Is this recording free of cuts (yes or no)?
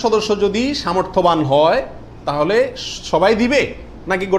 yes